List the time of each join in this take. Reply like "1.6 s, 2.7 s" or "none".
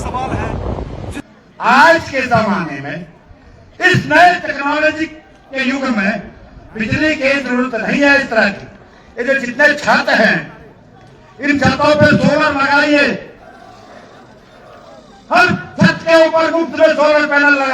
1.2 s